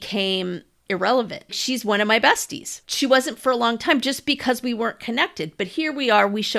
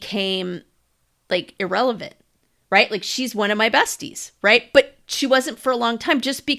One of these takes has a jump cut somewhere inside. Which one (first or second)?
first